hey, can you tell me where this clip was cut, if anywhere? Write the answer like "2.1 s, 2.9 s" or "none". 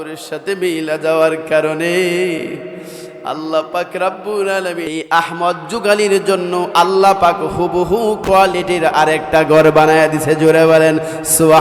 4.9 s